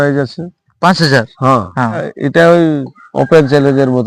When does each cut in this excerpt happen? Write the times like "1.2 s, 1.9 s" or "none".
2.1 s